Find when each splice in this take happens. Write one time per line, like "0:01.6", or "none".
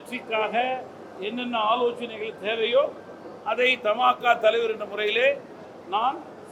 none